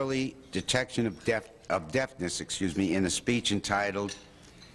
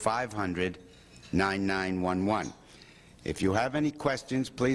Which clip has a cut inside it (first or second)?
first